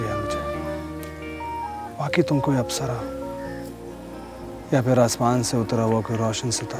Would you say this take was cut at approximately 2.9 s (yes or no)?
no